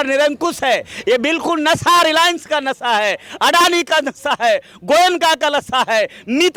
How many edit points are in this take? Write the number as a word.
zero